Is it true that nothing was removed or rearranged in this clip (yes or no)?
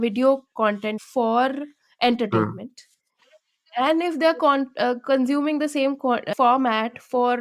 no